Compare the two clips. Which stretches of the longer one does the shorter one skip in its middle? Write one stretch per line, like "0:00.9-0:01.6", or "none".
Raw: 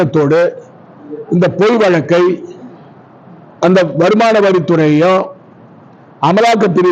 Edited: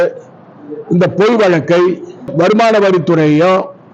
0:02.7-0:03.9